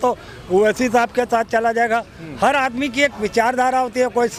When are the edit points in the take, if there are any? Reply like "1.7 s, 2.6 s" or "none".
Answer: none